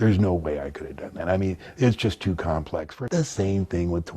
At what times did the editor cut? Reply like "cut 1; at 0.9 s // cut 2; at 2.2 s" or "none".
cut 1; at 2.9 s